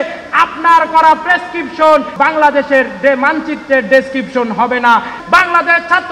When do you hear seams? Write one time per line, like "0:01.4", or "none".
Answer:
0:02.1
0:05.1